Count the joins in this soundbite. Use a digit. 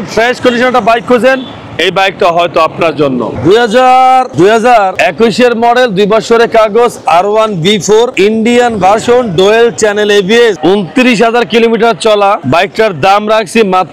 0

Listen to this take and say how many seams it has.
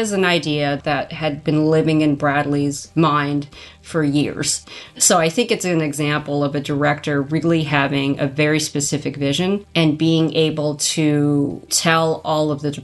4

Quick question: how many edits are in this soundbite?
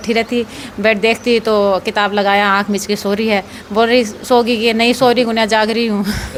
0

